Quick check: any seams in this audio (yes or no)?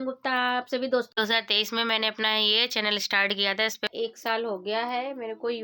yes